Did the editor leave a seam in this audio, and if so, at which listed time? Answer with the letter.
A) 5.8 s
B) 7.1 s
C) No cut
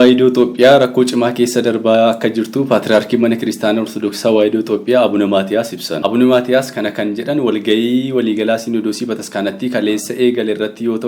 A